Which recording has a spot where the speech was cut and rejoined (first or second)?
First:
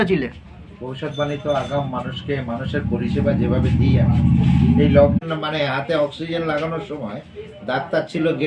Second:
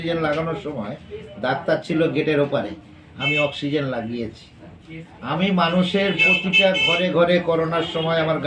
first